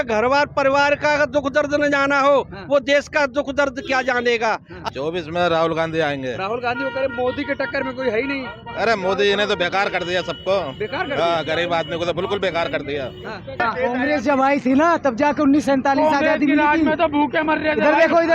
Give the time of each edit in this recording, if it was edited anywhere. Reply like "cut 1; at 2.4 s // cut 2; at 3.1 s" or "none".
cut 1; at 4.7 s // cut 2; at 13.6 s